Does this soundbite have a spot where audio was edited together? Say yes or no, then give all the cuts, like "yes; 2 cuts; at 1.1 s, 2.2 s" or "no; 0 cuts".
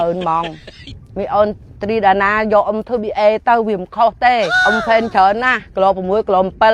no; 0 cuts